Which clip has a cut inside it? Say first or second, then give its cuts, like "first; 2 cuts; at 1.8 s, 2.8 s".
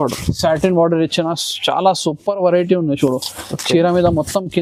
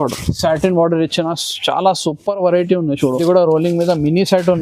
second; 1 cut; at 3.2 s